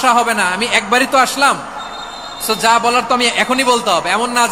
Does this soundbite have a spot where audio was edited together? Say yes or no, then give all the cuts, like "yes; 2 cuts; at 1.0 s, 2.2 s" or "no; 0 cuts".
no; 0 cuts